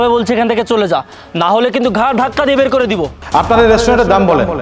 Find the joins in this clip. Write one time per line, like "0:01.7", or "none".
0:03.2